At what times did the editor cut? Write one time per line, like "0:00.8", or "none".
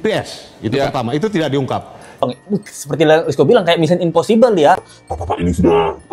0:02.2